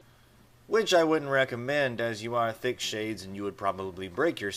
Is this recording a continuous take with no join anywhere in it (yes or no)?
no